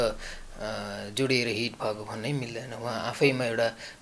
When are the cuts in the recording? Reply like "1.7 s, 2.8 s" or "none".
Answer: none